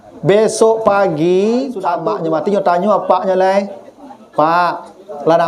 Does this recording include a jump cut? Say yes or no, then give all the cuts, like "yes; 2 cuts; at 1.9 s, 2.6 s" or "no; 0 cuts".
yes; 1 cut; at 2.0 s